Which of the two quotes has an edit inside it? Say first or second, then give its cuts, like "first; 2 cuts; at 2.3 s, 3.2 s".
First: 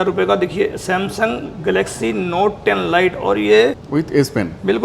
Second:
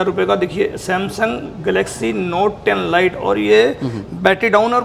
first; 1 cut; at 3.8 s